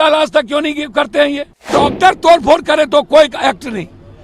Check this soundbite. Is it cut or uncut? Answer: cut